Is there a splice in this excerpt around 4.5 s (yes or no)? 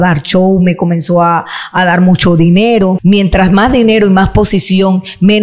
no